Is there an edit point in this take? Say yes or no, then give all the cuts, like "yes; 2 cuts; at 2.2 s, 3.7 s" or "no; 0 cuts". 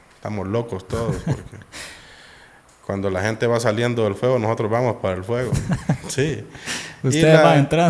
no; 0 cuts